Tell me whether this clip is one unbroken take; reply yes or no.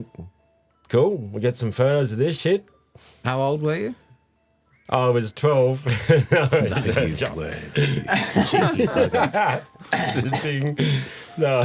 yes